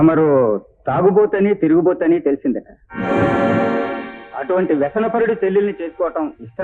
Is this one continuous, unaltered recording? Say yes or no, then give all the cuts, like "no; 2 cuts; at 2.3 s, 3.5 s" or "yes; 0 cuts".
yes; 0 cuts